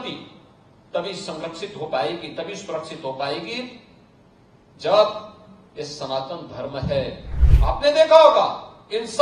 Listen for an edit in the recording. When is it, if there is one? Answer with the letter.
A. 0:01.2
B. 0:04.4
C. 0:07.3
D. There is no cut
C